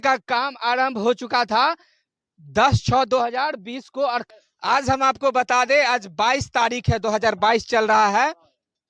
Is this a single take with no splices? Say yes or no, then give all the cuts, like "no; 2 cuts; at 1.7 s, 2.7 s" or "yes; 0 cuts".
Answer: yes; 0 cuts